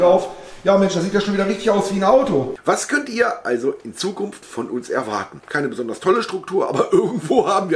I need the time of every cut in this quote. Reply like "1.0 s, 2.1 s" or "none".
2.5 s, 5.4 s